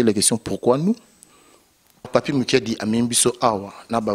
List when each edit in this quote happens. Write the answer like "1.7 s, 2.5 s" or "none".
2.1 s